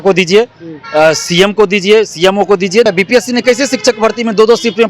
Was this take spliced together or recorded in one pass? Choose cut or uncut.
cut